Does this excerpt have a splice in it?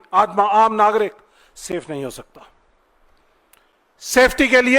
no; 0 cuts

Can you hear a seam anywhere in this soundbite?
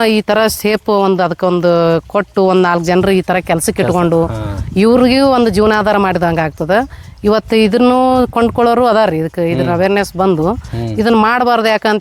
no; 0 cuts

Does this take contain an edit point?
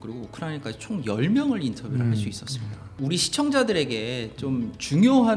yes; 1 cut; at 3.0 s

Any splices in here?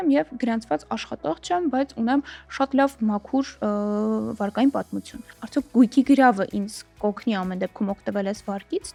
no; 0 cuts

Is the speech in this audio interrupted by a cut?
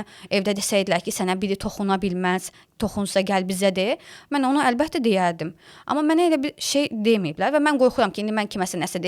no; 0 cuts

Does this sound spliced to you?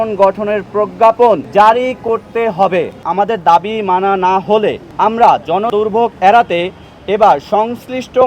yes; 4 cuts; at 1.4 s, 3.0 s, 4.8 s, 5.7 s

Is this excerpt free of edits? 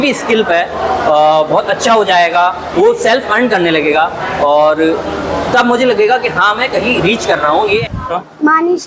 no; 1 cut; at 7.9 s

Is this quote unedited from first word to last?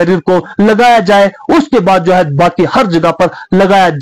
yes; 0 cuts

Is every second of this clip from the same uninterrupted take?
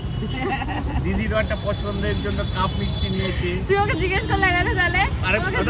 yes; 0 cuts

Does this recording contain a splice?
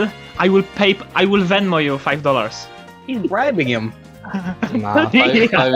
no; 0 cuts

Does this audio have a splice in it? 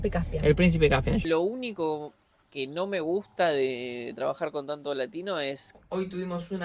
yes; 2 cuts; at 1.2 s, 5.8 s

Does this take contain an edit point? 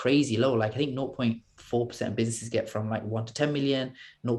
no; 0 cuts

